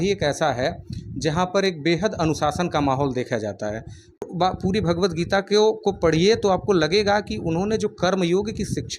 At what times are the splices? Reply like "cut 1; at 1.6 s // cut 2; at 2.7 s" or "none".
cut 1; at 4.2 s